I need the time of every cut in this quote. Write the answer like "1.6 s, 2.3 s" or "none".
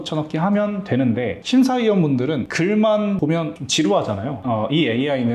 1.4 s, 2.5 s, 3.4 s, 4.4 s

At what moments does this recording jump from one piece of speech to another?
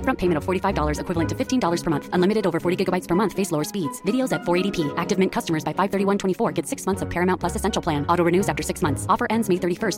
none

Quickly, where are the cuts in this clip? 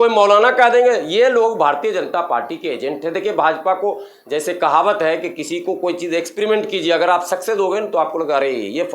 none

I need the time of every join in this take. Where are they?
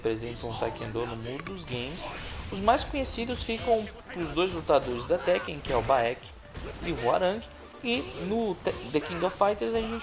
8.6 s

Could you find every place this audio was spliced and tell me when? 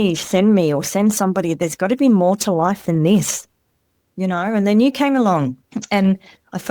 5.7 s

